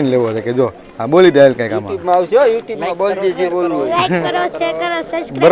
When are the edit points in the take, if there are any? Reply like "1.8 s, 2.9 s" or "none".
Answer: none